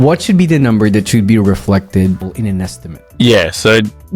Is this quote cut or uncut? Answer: uncut